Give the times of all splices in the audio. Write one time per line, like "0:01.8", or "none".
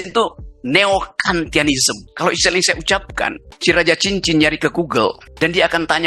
0:02.0
0:03.5
0:05.3